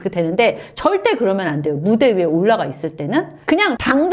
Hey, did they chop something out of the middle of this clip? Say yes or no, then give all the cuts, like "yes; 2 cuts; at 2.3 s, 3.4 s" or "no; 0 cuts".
no; 0 cuts